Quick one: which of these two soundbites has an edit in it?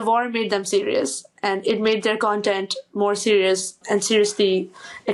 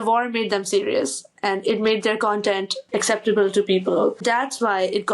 second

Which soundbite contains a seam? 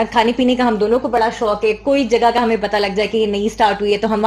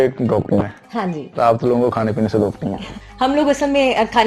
second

